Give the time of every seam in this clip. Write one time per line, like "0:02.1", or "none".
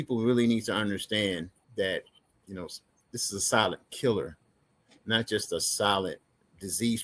none